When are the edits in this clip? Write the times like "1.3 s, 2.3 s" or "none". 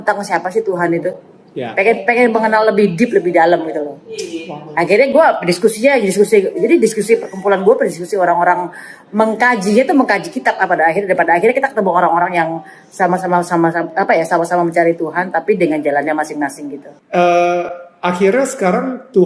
none